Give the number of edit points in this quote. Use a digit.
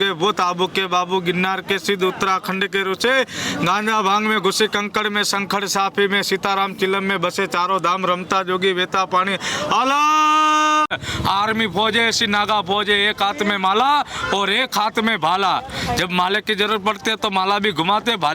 1